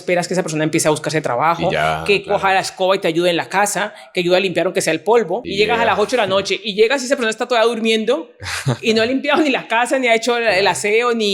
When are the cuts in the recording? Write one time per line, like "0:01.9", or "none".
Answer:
0:05.5